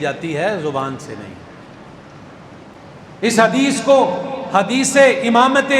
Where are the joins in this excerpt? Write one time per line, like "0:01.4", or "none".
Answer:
0:02.7